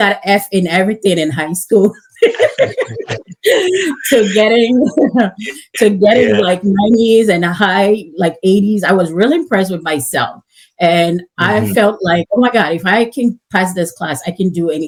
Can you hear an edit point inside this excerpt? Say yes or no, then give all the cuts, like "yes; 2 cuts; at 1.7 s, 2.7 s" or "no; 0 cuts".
no; 0 cuts